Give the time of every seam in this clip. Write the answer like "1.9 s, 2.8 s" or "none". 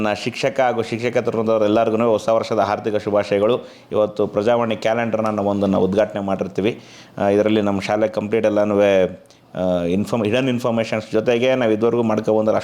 3.8 s